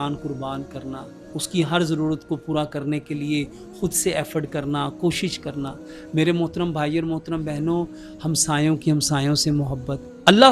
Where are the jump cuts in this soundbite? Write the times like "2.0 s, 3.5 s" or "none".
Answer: none